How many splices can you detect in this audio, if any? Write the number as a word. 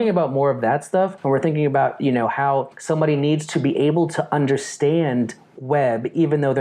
two